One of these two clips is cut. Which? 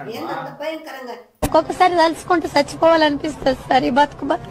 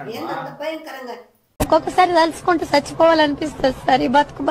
first; 1 cut; at 1.2 s

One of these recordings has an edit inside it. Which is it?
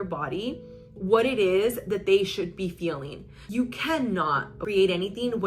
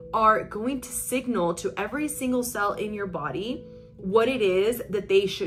first; 2 cuts; at 3.4 s, 4.6 s

